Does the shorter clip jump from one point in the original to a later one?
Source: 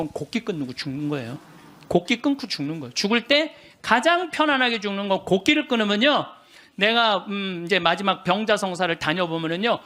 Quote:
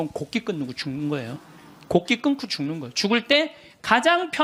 no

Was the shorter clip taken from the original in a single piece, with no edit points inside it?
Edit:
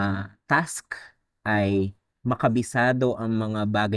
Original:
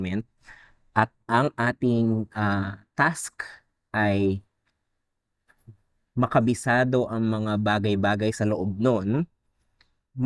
no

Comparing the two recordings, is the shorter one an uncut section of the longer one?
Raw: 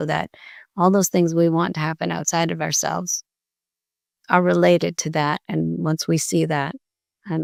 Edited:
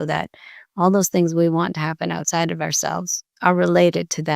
no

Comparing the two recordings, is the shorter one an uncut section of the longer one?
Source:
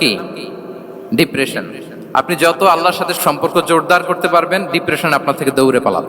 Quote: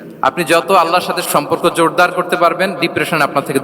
yes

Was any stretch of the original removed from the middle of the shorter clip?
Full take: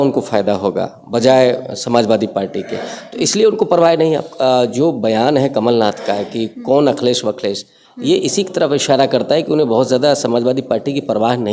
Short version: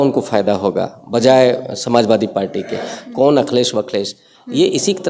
yes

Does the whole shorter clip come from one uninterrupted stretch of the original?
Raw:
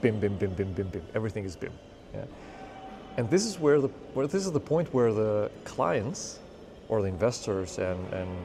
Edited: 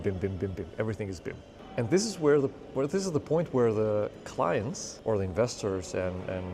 no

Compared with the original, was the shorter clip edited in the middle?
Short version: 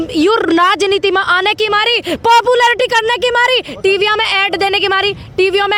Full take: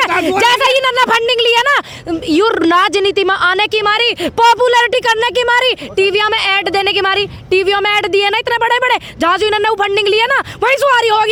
no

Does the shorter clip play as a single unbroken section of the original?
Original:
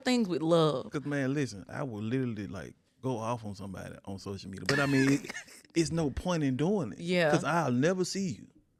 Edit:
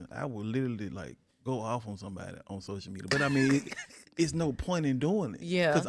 yes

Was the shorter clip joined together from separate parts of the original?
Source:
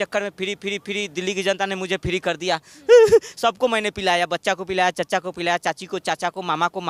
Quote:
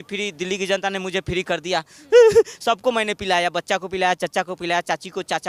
no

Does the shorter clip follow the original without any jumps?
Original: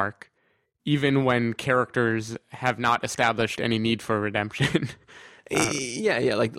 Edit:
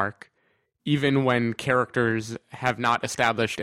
yes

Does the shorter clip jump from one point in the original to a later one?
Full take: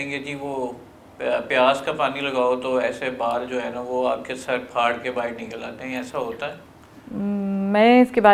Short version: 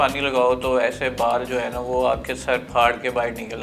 no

